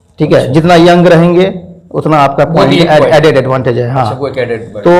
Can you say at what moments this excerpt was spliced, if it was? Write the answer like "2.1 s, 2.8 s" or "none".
none

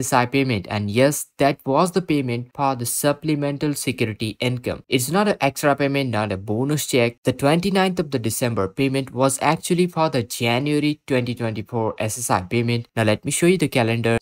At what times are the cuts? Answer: none

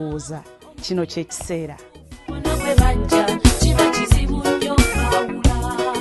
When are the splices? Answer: none

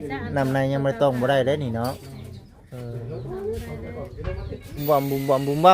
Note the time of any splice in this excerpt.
4.8 s

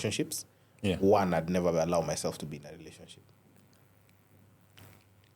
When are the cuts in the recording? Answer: none

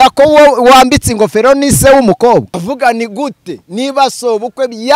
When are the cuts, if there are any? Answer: 2.6 s

